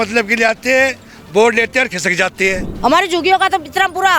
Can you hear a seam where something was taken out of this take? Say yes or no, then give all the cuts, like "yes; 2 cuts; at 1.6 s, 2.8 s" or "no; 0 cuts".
yes; 1 cut; at 2.7 s